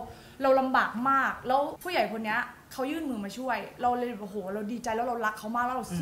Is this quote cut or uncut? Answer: cut